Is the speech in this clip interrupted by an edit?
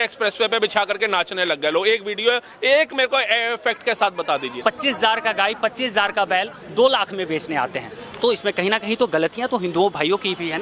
yes; 1 cut; at 4.6 s

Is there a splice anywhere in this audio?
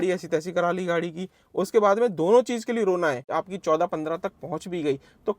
yes; 1 cut; at 3.4 s

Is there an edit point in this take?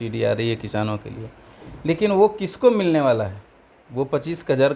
no; 0 cuts

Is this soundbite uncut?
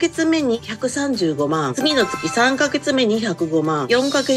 yes; 0 cuts

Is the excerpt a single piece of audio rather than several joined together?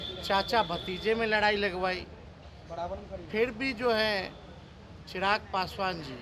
yes; 0 cuts

